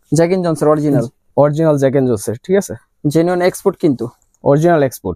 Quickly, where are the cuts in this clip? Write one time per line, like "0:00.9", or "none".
none